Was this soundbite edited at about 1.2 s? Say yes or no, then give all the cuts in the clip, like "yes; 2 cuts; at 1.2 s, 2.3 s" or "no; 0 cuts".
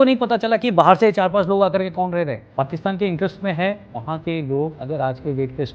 no; 3 cuts; at 2.4 s, 4.0 s, 4.8 s